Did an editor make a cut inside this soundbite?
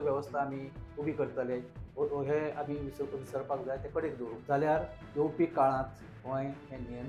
yes; 1 cut; at 4.4 s

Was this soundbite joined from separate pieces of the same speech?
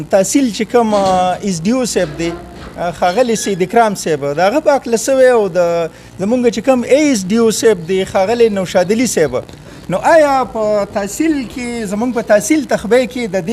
no; 0 cuts

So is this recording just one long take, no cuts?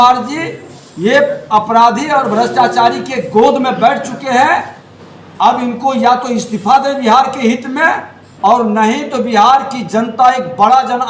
yes; 0 cuts

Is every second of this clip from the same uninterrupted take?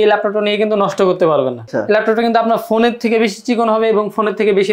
no; 1 cut; at 1.6 s

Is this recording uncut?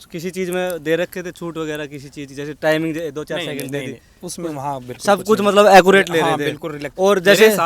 yes; 0 cuts

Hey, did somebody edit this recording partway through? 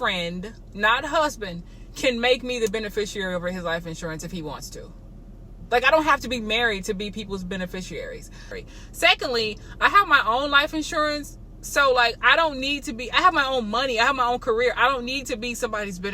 yes; 1 cut; at 8.6 s

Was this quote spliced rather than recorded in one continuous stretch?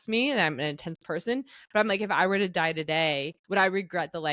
yes; 1 cut; at 3.3 s

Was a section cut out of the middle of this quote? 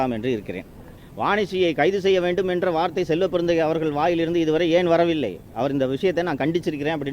yes; 1 cut; at 1.0 s

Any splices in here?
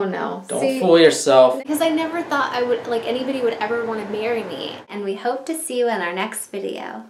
yes; 2 cuts; at 1.6 s, 4.9 s

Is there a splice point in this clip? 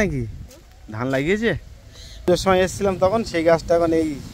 yes; 1 cut; at 2.3 s

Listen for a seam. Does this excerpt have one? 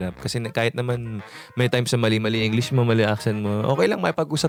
no; 0 cuts

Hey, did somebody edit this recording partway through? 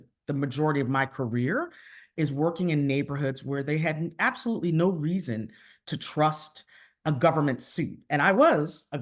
no; 0 cuts

